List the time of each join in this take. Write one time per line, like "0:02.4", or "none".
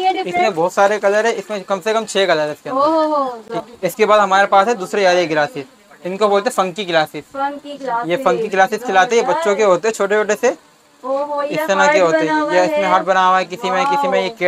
0:03.5